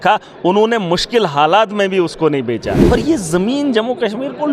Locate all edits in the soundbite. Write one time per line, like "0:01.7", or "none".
0:02.8